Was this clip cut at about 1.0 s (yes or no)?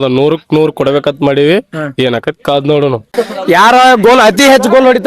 no